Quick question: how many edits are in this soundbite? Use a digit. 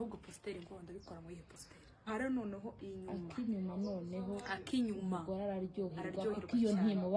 1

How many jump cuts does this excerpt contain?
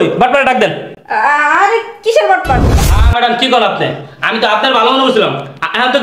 1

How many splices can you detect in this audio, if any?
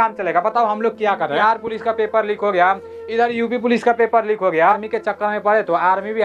2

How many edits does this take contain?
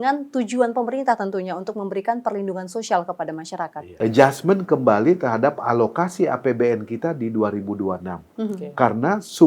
1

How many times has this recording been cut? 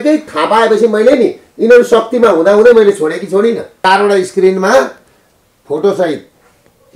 1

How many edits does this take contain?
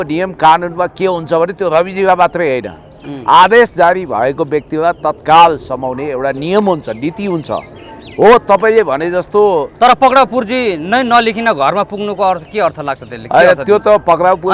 0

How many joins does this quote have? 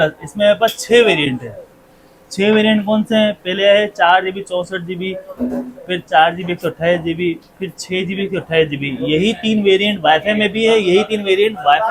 0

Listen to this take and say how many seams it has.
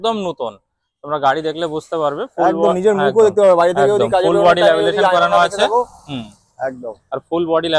0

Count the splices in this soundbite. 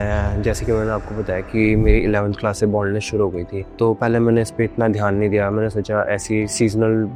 0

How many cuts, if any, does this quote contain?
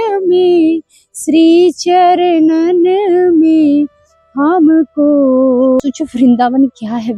1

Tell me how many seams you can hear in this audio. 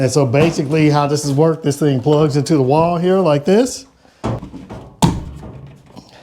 1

